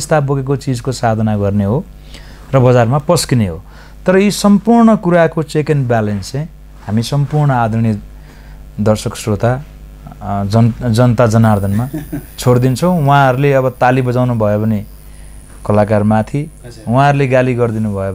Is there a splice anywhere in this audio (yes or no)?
no